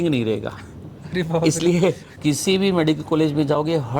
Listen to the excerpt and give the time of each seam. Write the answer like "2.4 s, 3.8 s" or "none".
2.1 s